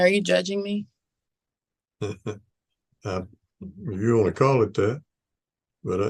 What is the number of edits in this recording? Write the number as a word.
zero